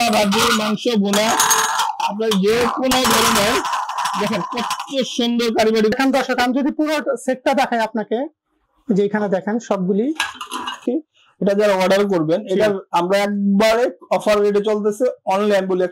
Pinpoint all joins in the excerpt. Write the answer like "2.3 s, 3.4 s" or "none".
5.9 s, 10.8 s